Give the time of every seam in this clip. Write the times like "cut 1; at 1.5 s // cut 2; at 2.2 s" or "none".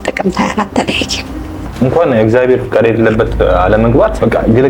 cut 1; at 1.6 s